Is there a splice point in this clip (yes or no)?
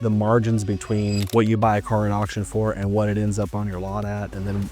yes